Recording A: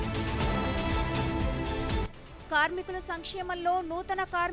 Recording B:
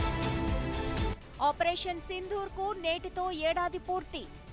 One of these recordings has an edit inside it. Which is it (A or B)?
A